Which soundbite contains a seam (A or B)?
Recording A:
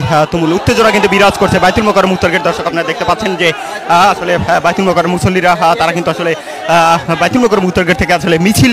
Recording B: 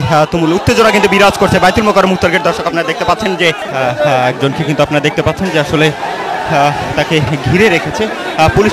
B